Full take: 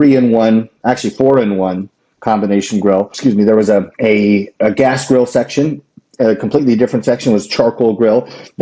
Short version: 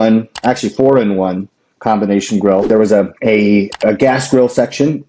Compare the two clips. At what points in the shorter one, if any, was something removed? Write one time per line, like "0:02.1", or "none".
0:02.7